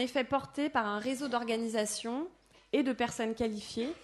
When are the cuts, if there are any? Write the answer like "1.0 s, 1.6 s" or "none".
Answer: 3.0 s